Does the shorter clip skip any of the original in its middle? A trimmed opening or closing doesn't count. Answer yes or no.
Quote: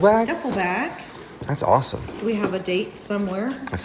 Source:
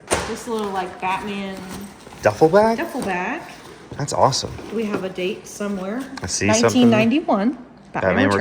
no